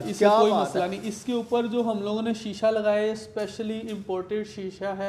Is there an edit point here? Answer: no; 0 cuts

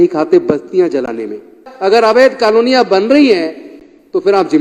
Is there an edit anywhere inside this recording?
yes; 1 cut; at 1.7 s

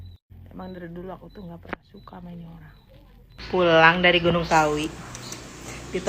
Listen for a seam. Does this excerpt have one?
yes; 1 cut; at 3.4 s

